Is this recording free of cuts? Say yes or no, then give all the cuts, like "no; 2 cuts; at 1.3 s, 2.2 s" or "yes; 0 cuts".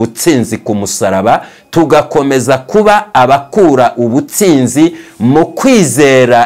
yes; 0 cuts